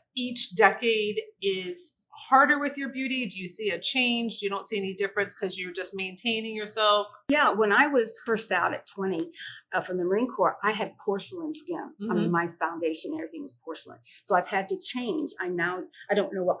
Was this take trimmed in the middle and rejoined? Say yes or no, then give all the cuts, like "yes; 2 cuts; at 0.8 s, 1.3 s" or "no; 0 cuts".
yes; 2 cuts; at 7.2 s, 8.2 s